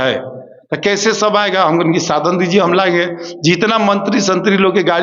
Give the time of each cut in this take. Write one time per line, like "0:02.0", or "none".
none